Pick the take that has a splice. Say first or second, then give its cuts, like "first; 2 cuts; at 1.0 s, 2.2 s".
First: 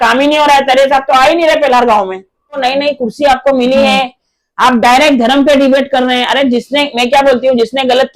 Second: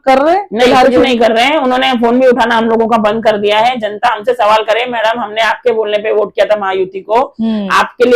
first; 1 cut; at 2.6 s